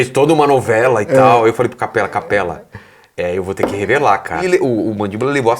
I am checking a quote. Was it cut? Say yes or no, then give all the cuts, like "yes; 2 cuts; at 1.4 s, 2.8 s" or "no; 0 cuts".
yes; 1 cut; at 4.4 s